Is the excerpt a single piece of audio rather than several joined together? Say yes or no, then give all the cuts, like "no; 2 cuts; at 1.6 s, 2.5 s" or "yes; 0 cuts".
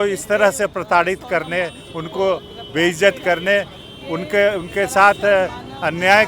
yes; 0 cuts